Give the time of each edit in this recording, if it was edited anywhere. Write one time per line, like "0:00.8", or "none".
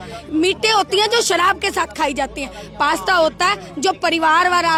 none